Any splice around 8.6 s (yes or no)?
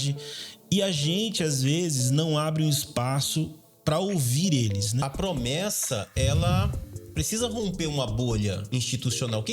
yes